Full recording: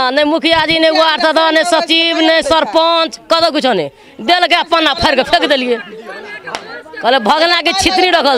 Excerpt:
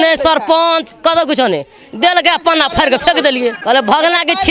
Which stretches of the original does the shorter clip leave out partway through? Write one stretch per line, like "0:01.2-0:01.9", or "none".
0:05.8-0:07.0